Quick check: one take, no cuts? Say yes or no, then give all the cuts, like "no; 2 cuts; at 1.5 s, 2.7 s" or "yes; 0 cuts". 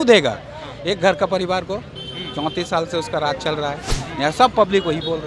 yes; 0 cuts